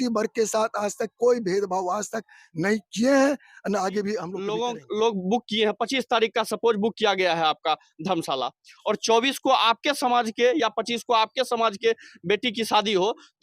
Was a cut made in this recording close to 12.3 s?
no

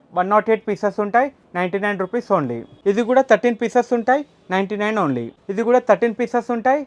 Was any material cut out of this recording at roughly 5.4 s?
yes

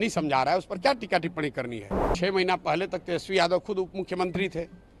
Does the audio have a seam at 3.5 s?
no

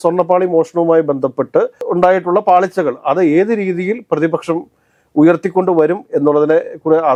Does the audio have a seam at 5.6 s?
no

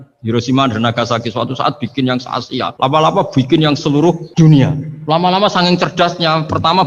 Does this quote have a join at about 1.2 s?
no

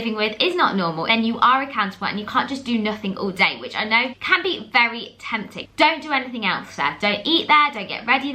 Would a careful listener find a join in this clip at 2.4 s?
no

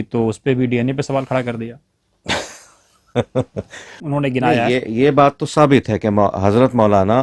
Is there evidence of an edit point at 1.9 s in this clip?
no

